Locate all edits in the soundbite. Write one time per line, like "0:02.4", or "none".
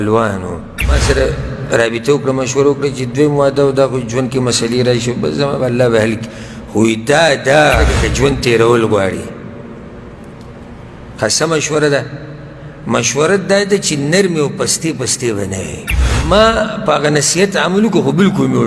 0:01.0
0:08.0
0:16.3